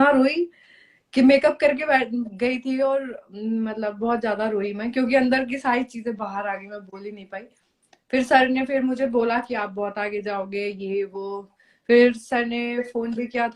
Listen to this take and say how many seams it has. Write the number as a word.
zero